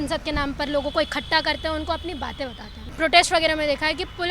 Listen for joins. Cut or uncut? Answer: cut